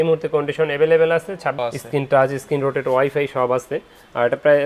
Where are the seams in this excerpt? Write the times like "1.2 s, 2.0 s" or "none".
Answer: 1.6 s